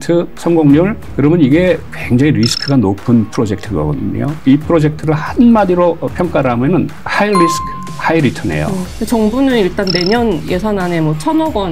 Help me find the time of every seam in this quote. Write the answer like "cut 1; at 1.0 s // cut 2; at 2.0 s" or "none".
cut 1; at 1.0 s // cut 2; at 1.9 s // cut 3; at 4.4 s // cut 4; at 7.0 s // cut 5; at 8.8 s